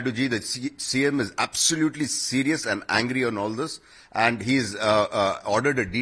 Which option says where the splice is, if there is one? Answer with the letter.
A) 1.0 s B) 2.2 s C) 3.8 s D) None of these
D